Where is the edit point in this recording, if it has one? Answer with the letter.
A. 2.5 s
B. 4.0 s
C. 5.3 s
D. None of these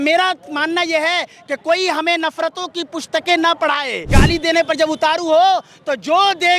B